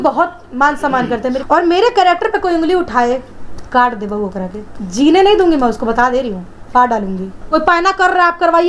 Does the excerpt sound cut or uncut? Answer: cut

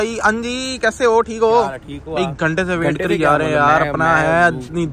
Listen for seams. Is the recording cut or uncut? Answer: uncut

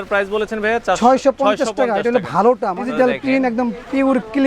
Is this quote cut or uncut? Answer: cut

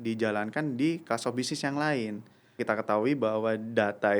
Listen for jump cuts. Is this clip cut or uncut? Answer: cut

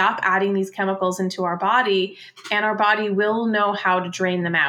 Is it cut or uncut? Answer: uncut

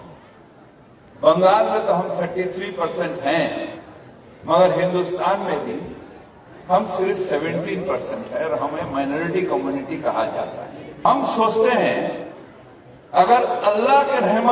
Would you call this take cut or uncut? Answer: cut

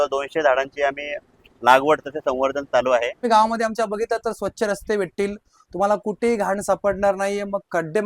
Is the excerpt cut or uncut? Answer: cut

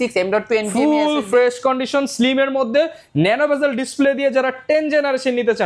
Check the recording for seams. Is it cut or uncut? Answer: uncut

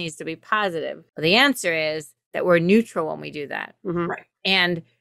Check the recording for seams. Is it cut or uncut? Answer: cut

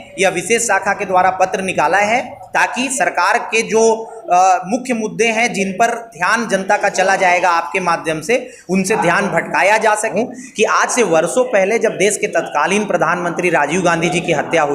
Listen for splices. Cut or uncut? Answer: cut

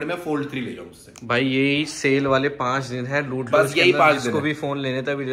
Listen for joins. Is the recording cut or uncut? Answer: uncut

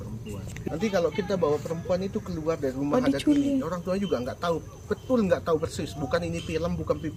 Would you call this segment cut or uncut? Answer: uncut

